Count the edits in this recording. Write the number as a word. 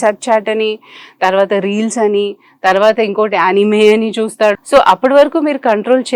one